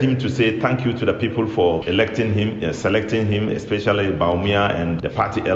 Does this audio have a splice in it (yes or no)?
no